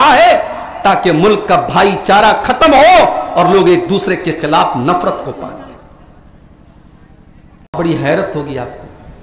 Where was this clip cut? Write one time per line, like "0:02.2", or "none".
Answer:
0:07.8